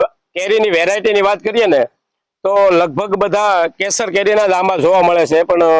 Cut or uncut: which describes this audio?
uncut